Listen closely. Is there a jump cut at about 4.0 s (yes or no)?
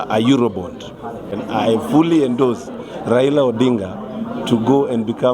no